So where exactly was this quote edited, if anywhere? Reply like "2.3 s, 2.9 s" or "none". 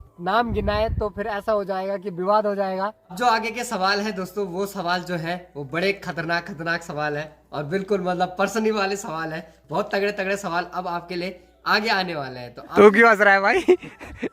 3.1 s, 12.5 s

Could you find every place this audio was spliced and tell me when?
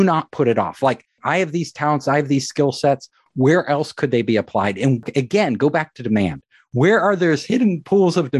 1.2 s, 5.0 s

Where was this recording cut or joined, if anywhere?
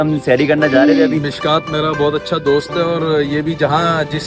none

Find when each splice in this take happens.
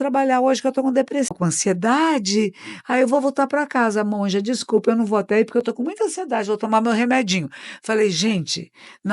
1.4 s

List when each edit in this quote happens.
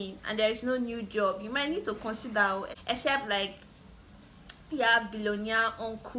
2.7 s

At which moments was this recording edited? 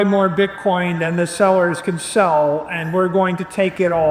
none

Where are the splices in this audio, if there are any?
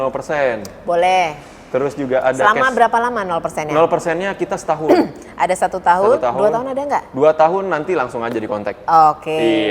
none

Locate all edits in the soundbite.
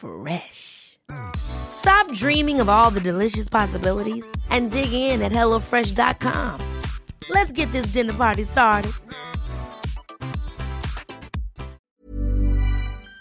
11.9 s

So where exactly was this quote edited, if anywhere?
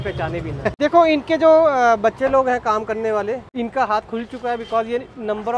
0.7 s, 3.5 s

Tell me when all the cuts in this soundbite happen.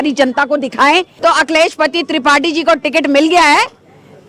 1.1 s

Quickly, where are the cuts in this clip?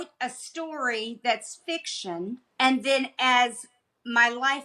2.5 s

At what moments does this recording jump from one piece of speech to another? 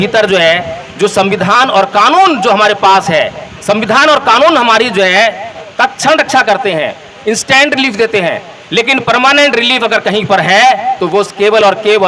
5.5 s

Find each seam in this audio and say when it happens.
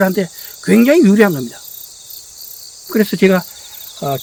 none

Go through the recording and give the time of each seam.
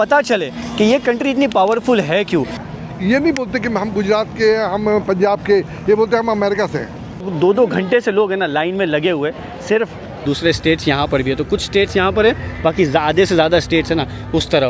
2.5 s, 7.2 s, 10.2 s

